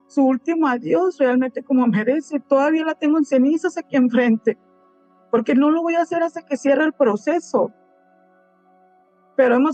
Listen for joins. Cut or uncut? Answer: uncut